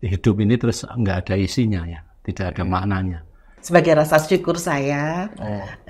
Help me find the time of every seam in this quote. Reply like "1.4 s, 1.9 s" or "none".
3.5 s